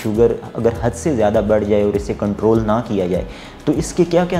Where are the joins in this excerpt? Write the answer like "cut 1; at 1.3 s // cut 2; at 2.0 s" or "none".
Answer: none

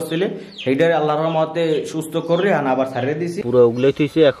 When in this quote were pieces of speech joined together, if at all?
cut 1; at 3.4 s

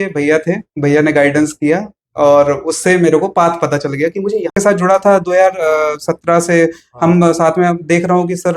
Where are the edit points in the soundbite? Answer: cut 1; at 4.5 s

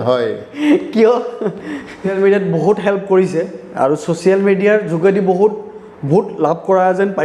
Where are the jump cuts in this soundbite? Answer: cut 1; at 2.1 s

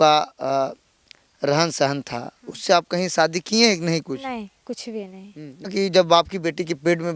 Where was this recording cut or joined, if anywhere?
cut 1; at 5.7 s

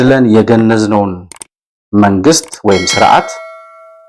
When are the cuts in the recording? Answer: none

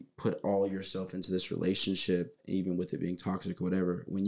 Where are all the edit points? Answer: none

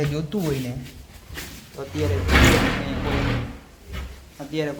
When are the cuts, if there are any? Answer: none

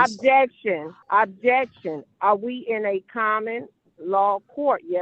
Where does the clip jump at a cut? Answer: cut 1; at 0.9 s

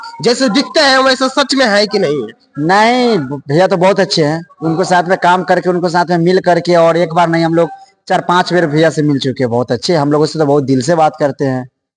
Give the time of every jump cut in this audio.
none

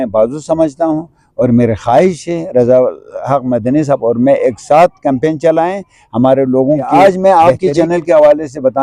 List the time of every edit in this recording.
cut 1; at 6.9 s

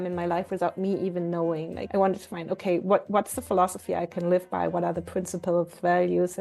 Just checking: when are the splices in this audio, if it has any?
cut 1; at 1.8 s

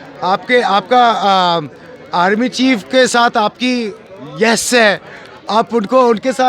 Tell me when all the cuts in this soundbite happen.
none

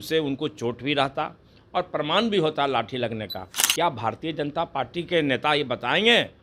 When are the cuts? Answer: none

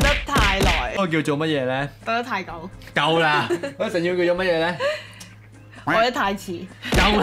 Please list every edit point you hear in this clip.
cut 1; at 1.0 s

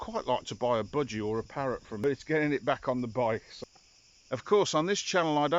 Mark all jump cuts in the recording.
cut 1; at 2.0 s // cut 2; at 3.5 s

